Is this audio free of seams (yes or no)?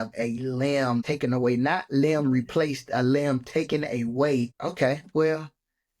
no